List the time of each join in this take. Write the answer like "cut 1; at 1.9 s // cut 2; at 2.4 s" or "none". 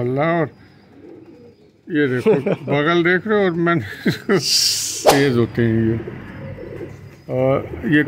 cut 1; at 5.0 s